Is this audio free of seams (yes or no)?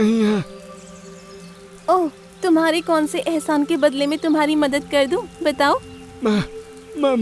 yes